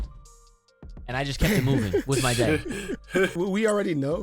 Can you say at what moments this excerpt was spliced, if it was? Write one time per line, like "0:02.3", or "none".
0:03.3

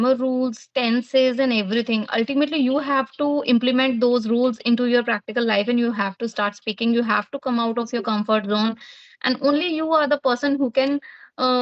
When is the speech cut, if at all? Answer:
none

